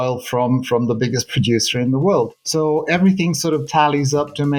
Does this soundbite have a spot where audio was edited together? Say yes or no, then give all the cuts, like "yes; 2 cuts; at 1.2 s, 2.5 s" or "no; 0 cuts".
no; 0 cuts